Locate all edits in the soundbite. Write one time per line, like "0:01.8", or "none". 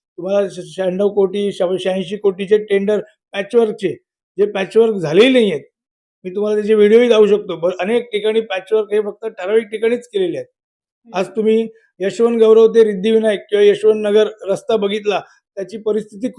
none